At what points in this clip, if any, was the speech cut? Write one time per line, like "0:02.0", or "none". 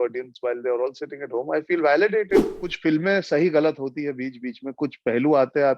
0:02.6